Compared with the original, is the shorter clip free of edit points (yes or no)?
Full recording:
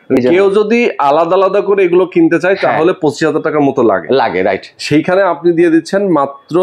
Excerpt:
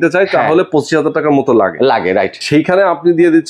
no